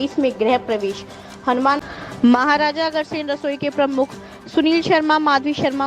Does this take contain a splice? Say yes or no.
yes